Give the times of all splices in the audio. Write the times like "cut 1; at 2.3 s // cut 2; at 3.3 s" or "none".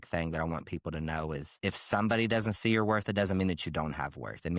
cut 1; at 1.5 s